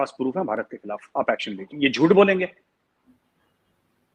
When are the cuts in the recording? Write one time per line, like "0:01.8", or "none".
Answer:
0:01.7